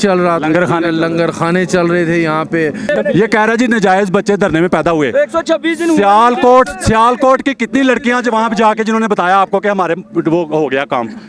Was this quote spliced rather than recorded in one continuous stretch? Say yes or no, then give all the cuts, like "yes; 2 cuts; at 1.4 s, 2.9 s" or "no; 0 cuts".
yes; 1 cut; at 2.9 s